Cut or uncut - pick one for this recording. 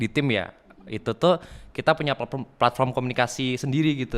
uncut